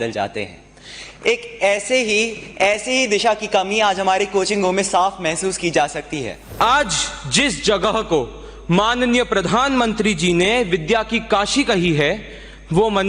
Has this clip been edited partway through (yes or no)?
yes